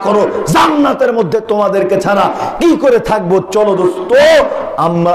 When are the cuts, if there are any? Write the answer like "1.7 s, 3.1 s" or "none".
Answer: none